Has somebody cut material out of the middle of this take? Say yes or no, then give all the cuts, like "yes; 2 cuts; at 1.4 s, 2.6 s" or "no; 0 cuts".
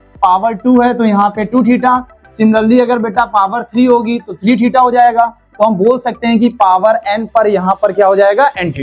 no; 0 cuts